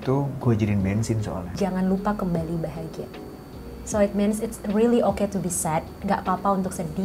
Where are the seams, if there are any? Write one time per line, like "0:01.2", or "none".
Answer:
0:01.5